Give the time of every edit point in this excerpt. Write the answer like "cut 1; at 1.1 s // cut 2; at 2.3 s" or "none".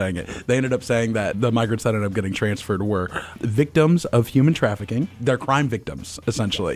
cut 1; at 1.3 s // cut 2; at 3.4 s // cut 3; at 5.1 s